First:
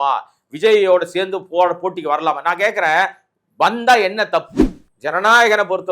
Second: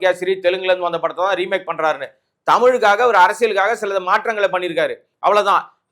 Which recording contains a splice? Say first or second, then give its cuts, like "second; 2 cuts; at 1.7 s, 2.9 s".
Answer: first; 1 cut; at 4.7 s